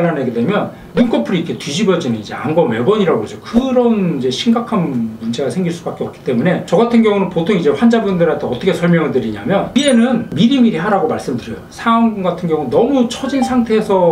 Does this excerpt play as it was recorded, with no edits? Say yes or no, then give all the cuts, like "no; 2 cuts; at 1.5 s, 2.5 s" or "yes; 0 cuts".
yes; 0 cuts